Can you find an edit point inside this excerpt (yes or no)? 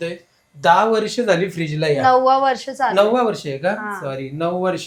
no